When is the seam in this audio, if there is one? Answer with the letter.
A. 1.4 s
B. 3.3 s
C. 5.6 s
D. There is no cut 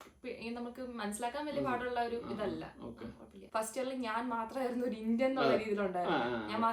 B